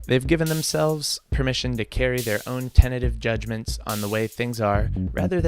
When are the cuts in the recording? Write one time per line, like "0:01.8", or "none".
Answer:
0:01.2